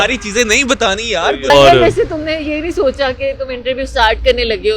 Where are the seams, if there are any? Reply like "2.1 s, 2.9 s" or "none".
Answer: 1.5 s